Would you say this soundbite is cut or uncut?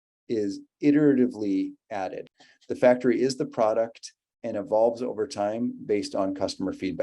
cut